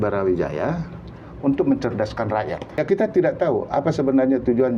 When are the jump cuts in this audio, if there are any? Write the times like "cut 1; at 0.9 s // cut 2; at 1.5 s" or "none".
cut 1; at 2.7 s